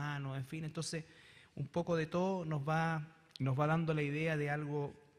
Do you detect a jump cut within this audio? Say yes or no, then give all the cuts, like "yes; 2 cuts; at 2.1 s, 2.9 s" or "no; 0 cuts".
yes; 1 cut; at 2.4 s